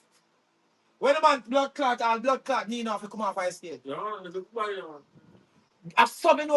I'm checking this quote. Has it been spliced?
no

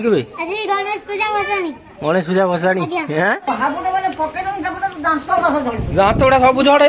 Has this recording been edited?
yes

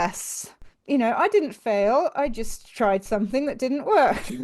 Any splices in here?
no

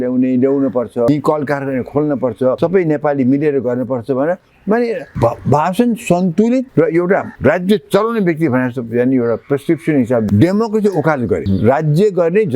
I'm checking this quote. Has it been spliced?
yes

